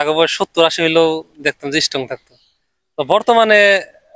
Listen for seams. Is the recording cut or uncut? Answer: uncut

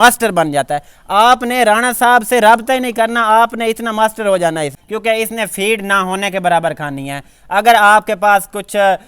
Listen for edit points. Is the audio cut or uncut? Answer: cut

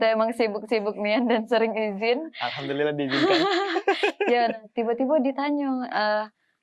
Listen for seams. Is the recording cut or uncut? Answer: uncut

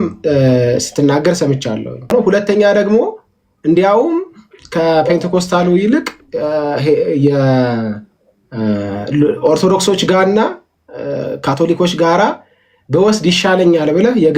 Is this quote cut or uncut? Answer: cut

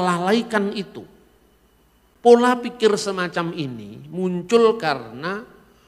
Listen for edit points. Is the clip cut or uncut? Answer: cut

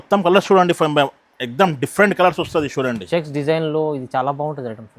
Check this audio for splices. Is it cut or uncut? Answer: uncut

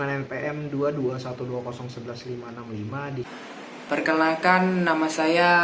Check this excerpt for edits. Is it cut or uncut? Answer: cut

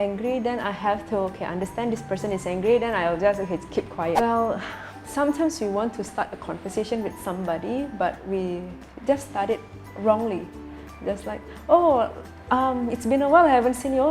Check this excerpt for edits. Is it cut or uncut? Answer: cut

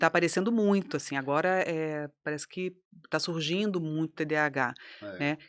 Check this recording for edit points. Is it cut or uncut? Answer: uncut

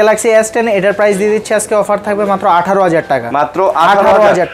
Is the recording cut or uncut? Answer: uncut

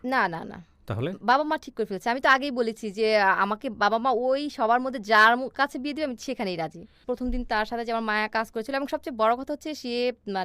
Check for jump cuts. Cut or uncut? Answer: cut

